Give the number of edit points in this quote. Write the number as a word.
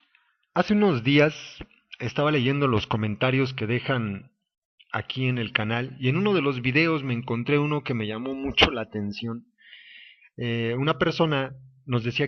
one